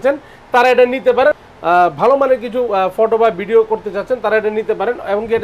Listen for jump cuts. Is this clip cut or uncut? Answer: cut